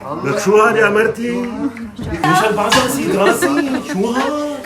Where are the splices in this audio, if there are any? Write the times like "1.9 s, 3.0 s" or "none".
2.2 s